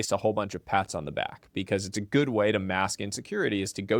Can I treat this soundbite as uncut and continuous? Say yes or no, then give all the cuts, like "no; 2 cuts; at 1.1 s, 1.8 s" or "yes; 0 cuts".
yes; 0 cuts